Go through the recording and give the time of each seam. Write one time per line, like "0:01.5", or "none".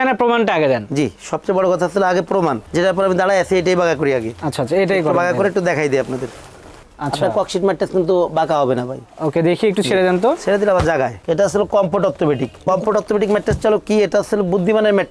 0:11.2